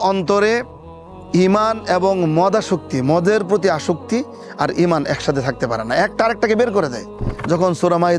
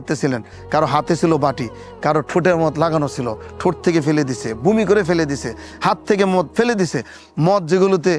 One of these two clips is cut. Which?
first; 1 cut; at 7.3 s

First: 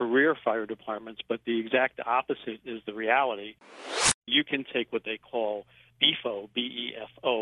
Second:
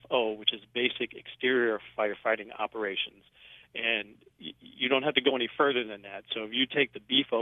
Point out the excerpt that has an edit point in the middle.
first; 3 cuts; at 2.6 s, 3.9 s, 5.9 s

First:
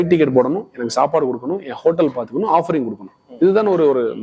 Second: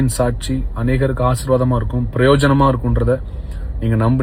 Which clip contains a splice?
first; 1 cut; at 3.1 s

